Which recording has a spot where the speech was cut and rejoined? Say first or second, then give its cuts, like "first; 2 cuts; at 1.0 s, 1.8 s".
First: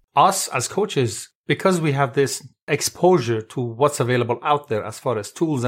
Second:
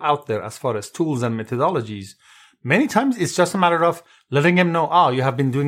first; 1 cut; at 2.7 s